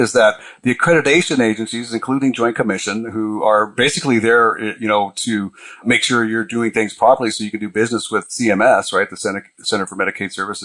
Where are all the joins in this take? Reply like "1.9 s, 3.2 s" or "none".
5.8 s, 8.3 s